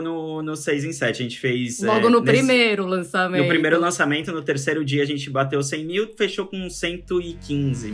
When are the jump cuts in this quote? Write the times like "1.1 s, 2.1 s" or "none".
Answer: none